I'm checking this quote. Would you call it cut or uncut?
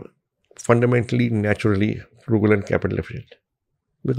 uncut